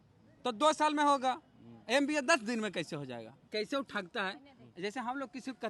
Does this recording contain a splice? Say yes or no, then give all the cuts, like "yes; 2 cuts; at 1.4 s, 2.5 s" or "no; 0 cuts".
yes; 1 cut; at 3.5 s